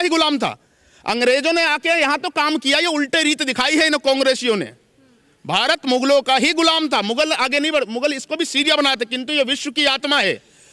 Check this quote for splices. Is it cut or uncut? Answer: uncut